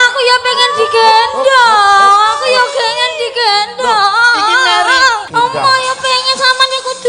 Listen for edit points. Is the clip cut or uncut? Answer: cut